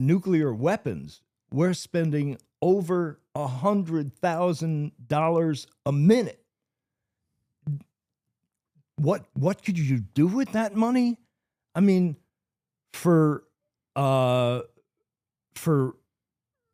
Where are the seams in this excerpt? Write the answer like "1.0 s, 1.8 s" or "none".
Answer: none